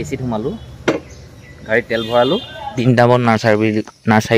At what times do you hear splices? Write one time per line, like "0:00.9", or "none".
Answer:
0:02.8